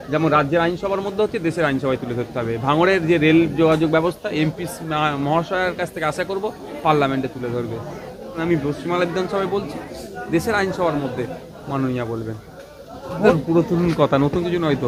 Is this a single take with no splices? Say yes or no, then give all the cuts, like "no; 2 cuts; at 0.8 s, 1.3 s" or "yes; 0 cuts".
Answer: no; 2 cuts; at 8.4 s, 13.3 s